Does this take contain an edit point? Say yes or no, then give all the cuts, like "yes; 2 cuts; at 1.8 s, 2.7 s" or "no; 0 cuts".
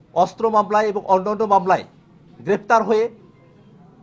no; 0 cuts